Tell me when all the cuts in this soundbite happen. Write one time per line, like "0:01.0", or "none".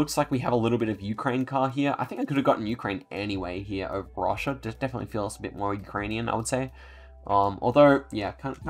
none